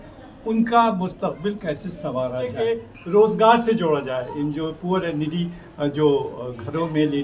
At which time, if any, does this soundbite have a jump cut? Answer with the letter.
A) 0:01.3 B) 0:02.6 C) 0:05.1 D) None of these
B